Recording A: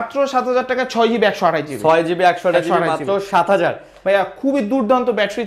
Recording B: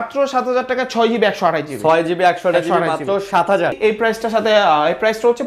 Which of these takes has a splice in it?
B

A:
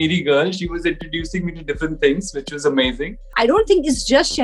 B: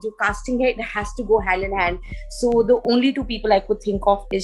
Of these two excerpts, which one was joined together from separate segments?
A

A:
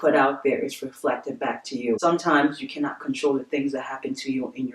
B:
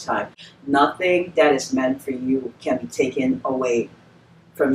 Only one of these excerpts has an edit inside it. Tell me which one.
A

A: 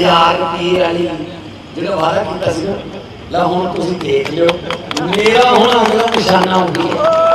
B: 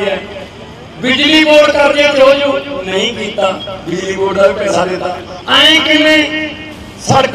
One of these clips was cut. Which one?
B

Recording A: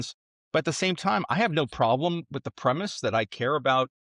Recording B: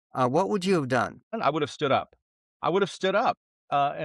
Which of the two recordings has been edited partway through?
B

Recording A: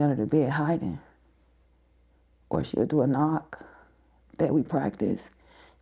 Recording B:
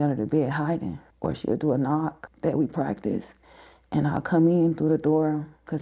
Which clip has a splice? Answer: B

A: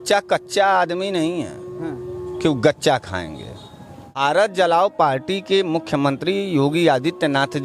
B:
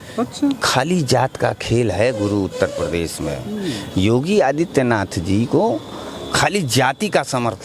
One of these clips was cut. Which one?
A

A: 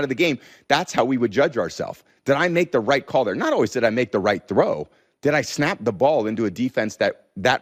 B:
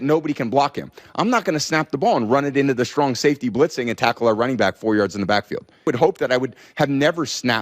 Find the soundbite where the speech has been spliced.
B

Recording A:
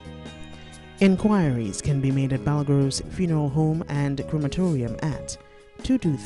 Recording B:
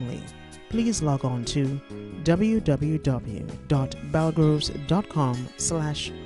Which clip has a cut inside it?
A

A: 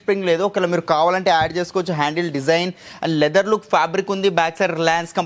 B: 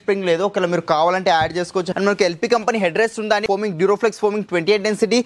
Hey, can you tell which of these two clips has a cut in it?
B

